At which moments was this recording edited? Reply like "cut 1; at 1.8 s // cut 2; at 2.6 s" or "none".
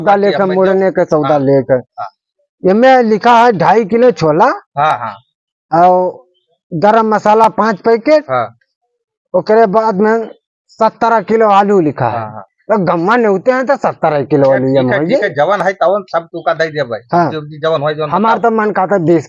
none